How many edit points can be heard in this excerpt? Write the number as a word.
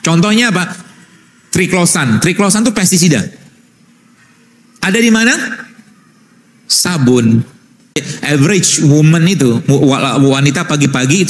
one